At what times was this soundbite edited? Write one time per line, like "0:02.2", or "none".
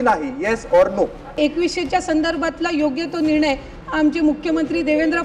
0:01.4